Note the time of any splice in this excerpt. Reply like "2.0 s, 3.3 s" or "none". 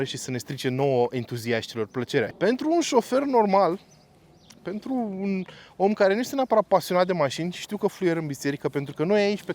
2.3 s